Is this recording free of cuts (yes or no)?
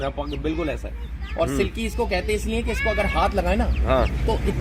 yes